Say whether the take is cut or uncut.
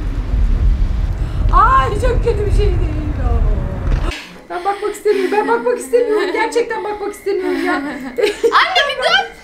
cut